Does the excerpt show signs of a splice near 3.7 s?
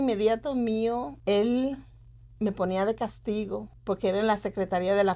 yes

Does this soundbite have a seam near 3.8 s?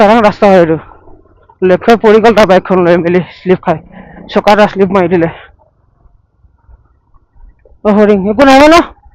no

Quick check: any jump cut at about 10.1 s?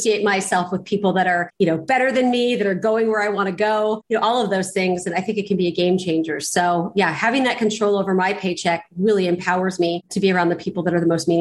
yes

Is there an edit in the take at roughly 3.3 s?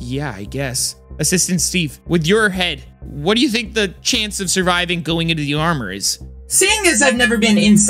no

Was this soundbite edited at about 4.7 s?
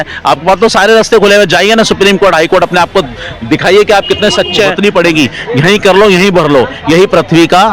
yes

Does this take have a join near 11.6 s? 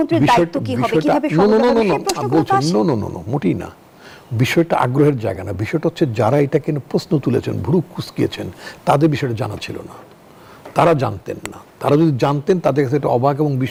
no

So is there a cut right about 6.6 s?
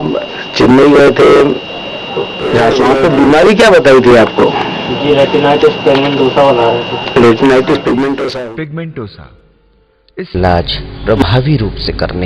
no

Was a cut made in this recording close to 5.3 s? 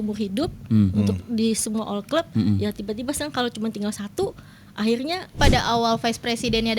yes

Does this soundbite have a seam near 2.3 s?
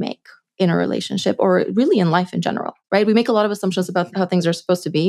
no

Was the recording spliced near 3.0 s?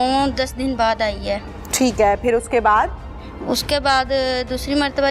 no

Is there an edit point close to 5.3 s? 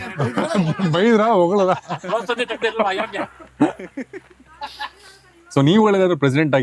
yes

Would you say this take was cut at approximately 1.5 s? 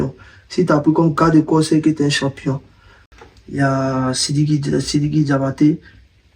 no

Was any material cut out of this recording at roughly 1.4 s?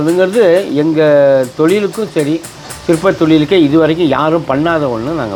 no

